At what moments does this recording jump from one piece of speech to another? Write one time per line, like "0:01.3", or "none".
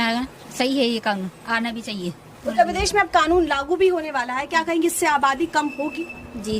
none